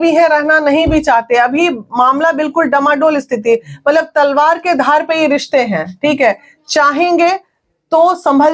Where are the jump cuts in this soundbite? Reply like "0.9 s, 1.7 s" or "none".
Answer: none